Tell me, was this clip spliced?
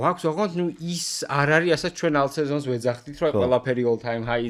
no; 0 cuts

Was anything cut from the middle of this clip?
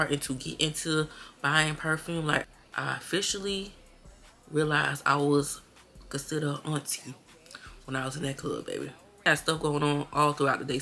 yes; 2 cuts; at 2.4 s, 9.3 s

